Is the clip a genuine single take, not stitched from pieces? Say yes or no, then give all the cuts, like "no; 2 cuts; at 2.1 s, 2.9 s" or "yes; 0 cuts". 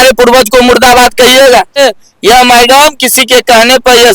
no; 1 cut; at 1.8 s